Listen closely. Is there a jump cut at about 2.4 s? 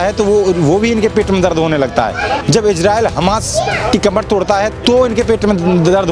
yes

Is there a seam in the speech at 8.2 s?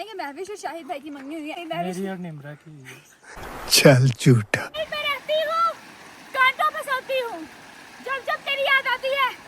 no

